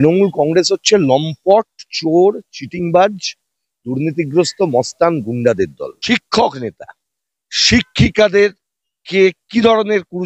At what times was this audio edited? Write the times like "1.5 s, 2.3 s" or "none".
5.9 s